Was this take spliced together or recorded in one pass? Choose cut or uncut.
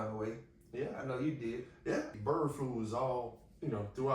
cut